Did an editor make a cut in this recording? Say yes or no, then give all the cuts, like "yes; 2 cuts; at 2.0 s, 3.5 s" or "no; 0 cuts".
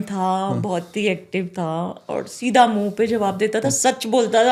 no; 0 cuts